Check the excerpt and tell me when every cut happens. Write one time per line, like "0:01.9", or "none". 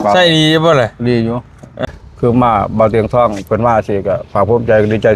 0:01.7